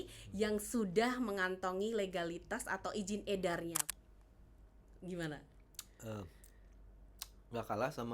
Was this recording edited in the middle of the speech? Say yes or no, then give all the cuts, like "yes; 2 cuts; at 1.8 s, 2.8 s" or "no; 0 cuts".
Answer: yes; 1 cut; at 3.8 s